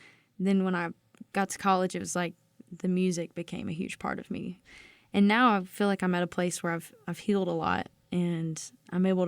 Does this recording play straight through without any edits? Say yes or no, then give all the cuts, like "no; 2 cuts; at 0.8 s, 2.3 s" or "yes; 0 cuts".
no; 1 cut; at 4.7 s